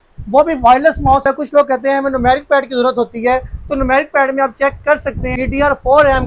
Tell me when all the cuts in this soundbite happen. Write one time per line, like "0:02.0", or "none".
0:01.2
0:05.3